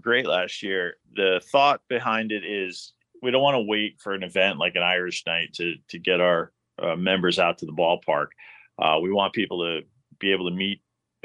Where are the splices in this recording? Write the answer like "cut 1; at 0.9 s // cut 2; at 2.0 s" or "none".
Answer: cut 1; at 1.0 s // cut 2; at 3.1 s